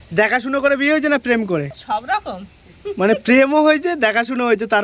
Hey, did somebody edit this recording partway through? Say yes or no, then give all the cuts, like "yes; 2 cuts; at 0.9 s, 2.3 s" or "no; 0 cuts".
yes; 1 cut; at 1.8 s